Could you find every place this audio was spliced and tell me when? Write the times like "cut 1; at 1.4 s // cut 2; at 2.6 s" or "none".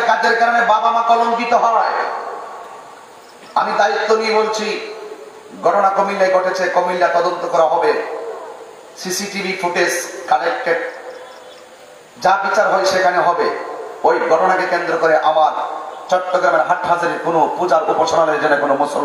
none